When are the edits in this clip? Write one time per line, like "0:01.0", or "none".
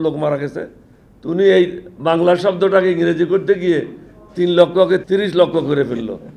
0:05.0